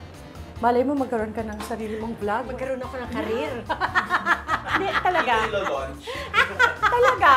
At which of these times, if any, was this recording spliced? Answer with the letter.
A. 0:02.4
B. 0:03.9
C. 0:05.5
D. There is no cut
D